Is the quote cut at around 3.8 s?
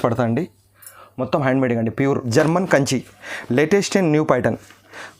no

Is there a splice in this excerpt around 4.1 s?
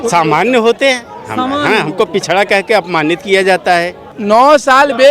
yes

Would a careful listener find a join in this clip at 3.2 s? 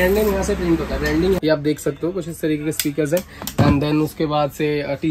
no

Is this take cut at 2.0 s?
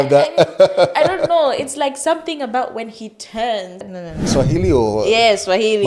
no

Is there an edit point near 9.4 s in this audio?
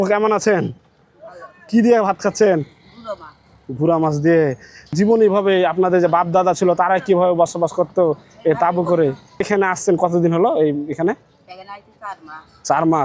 yes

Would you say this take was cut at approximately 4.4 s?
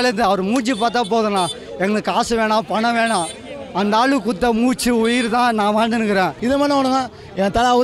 no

